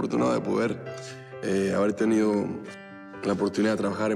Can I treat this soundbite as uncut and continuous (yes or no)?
yes